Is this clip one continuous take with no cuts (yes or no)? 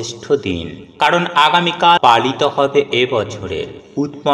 no